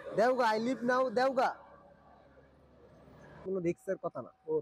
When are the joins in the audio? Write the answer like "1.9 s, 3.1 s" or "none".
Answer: 3.5 s

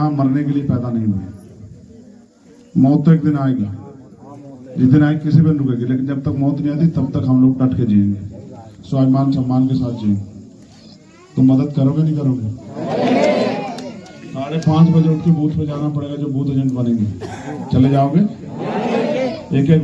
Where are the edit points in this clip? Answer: none

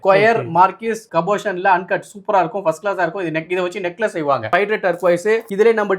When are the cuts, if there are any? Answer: 4.5 s

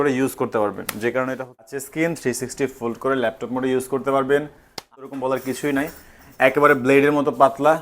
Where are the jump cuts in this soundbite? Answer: 1.7 s, 4.9 s

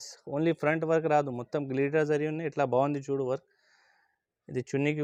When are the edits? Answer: none

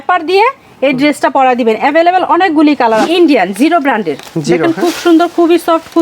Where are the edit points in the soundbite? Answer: 3.1 s

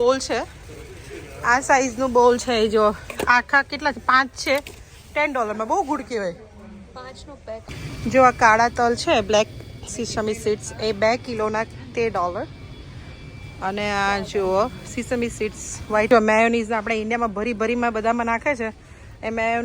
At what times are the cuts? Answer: 7.7 s, 16.1 s

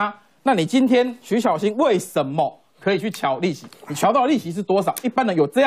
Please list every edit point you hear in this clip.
none

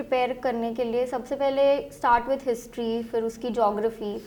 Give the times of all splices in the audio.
none

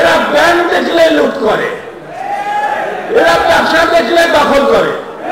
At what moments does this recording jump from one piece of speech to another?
none

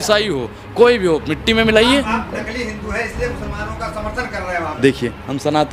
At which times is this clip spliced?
4.8 s

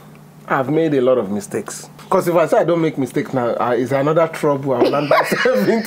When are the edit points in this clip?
2.0 s

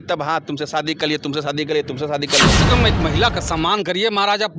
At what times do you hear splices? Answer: 2.4 s

